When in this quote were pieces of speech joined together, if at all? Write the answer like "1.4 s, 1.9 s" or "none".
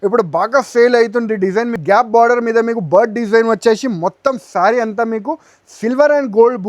1.8 s

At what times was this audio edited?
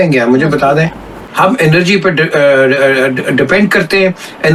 none

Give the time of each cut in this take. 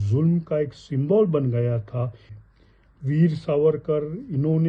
2.3 s

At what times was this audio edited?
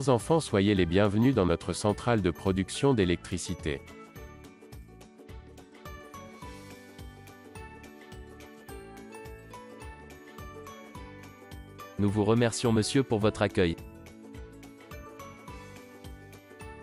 4.4 s, 11.7 s, 14.1 s

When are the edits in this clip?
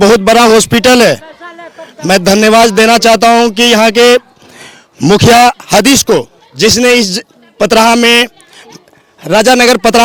none

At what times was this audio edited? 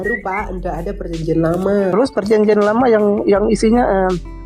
1.9 s

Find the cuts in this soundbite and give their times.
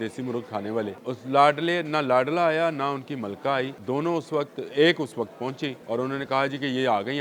1.0 s, 3.8 s, 5.8 s

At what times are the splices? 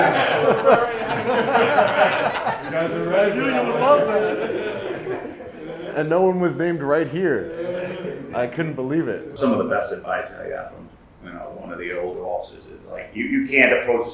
5.9 s, 9.3 s

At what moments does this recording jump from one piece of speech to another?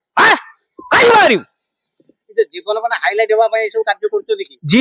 none

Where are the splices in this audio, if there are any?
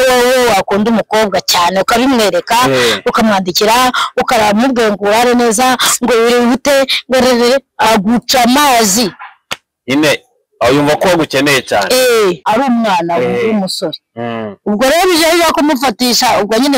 12.4 s

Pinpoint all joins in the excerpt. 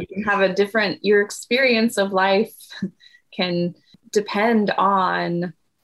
3.9 s

